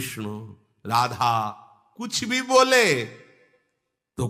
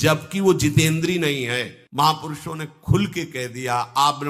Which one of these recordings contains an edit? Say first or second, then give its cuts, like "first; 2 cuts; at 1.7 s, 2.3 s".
second; 1 cut; at 1.8 s